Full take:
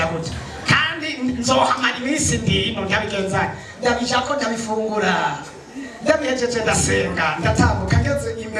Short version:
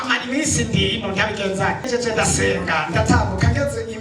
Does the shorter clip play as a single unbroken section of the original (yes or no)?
no